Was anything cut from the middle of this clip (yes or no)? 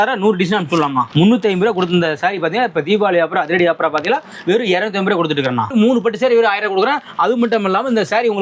yes